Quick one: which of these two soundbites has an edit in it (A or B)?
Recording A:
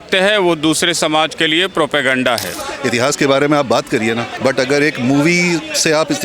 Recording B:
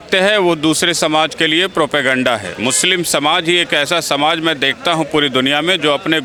A